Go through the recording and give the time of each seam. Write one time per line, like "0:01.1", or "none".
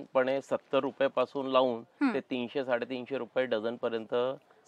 none